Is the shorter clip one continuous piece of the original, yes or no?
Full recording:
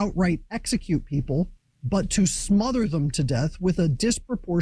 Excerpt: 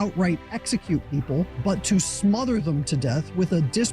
no